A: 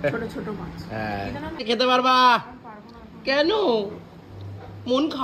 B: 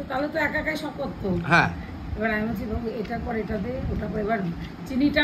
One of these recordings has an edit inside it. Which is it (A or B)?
A